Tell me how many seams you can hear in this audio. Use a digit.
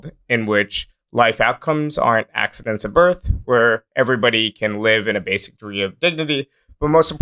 0